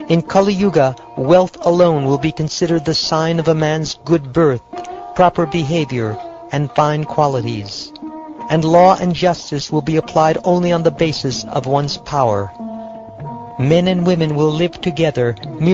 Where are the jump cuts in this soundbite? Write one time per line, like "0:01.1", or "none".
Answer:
0:14.0